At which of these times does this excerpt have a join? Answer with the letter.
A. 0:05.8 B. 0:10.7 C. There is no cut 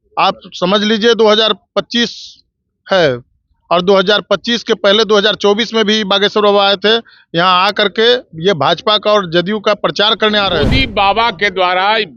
B